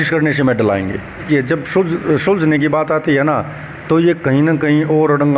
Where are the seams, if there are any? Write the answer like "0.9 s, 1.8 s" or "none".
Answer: 1.3 s